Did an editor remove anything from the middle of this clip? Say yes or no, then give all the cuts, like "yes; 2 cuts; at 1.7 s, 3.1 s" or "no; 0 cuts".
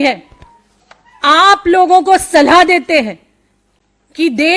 no; 0 cuts